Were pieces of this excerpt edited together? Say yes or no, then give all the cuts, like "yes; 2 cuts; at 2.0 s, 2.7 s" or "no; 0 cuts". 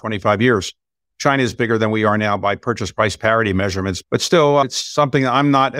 yes; 3 cuts; at 1.1 s, 4.0 s, 4.6 s